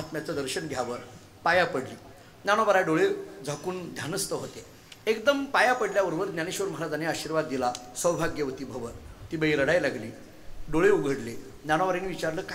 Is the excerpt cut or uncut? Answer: uncut